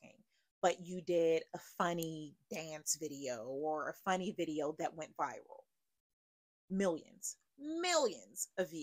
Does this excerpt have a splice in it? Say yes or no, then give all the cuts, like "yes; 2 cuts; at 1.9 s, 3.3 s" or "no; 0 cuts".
no; 0 cuts